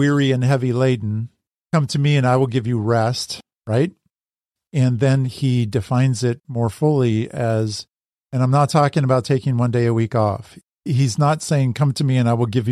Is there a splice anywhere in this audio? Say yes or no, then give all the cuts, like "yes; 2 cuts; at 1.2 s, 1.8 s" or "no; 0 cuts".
no; 0 cuts